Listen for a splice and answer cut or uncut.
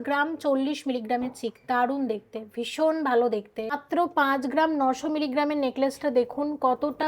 cut